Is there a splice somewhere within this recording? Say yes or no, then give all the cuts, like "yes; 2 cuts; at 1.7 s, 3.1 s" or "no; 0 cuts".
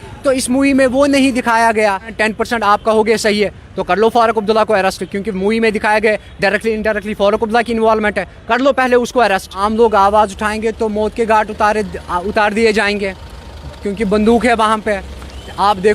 yes; 2 cuts; at 2.1 s, 9.5 s